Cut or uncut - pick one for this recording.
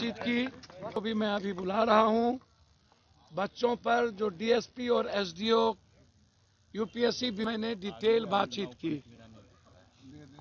cut